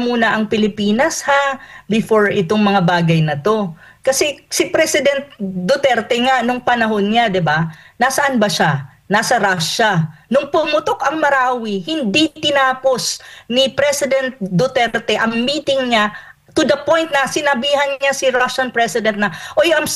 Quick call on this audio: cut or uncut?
uncut